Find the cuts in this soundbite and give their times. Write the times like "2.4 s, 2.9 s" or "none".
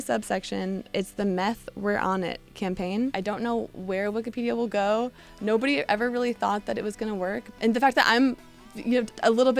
0.9 s, 3.6 s, 7.5 s